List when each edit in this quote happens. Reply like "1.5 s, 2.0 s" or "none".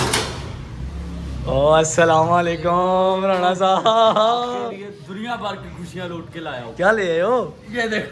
none